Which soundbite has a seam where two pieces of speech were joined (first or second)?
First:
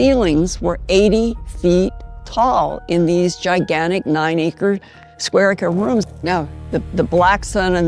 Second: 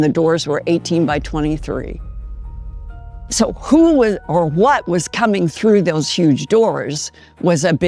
first